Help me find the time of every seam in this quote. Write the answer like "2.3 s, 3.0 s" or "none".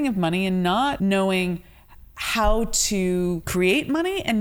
1.0 s, 3.4 s